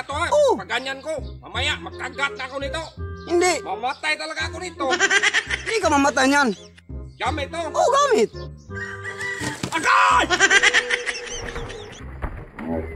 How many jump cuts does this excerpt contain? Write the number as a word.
zero